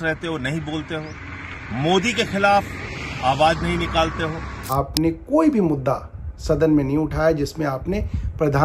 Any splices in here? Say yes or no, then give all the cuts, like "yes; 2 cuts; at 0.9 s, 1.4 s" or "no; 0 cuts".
yes; 1 cut; at 4.7 s